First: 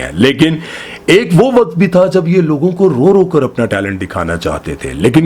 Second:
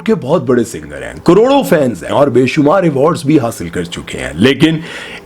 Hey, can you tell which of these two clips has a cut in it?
second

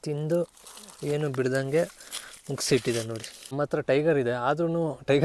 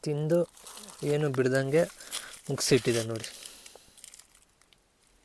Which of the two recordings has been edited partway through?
first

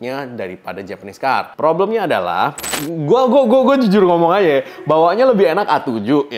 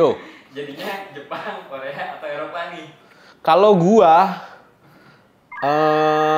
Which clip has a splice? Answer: first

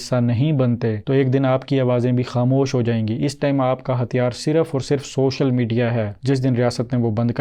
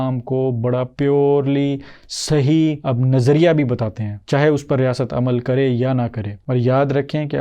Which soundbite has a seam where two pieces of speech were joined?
second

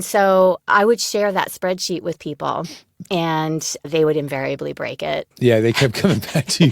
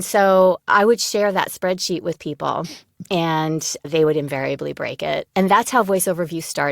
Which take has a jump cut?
second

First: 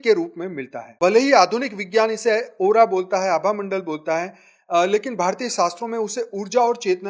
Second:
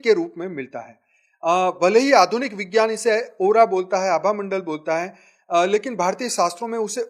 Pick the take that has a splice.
first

